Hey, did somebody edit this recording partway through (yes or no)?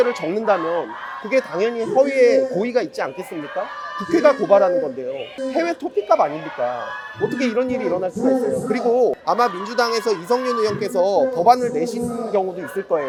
no